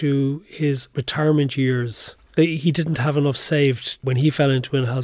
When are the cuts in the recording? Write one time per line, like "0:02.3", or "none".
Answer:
0:00.9
0:02.3
0:04.0

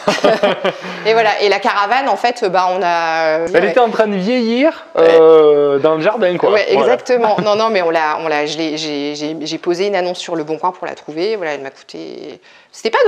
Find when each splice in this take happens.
none

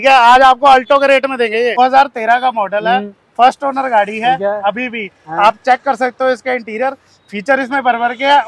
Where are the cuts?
0:01.7

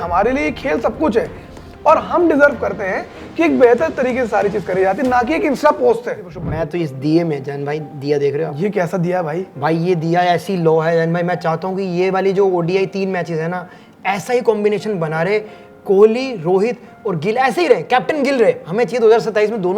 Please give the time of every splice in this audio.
0:06.4

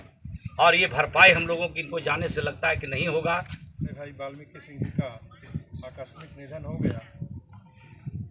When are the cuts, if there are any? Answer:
0:03.9

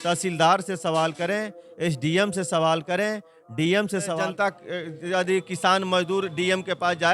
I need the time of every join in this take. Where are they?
0:04.1

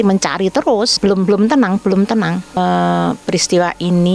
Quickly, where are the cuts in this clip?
0:01.0
0:02.5

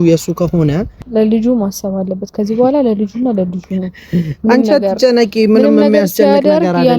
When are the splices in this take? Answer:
0:01.0

